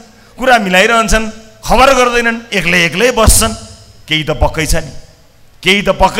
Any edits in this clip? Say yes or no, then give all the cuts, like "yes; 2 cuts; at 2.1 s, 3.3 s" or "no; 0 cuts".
no; 0 cuts